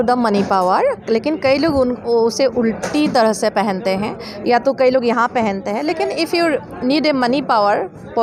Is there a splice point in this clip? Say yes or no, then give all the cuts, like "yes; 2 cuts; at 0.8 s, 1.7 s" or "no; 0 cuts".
no; 0 cuts